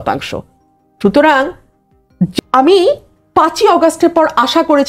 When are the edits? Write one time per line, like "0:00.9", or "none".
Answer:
0:02.3